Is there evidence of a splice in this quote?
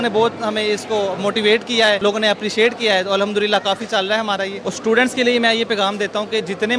yes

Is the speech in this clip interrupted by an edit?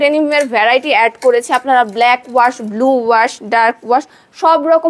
no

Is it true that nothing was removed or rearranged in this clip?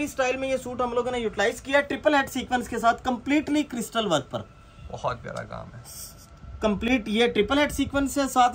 yes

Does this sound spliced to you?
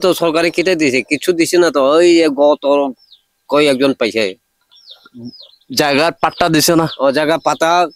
no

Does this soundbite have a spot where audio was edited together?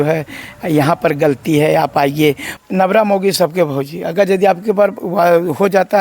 yes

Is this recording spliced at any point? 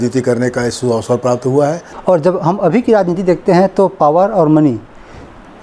yes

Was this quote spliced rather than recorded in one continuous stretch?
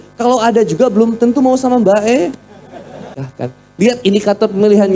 yes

